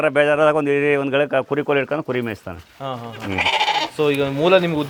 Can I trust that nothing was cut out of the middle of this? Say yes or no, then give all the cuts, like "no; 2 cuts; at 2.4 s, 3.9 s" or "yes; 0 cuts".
yes; 0 cuts